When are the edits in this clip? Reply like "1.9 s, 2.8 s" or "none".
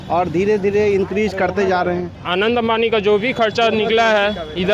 2.2 s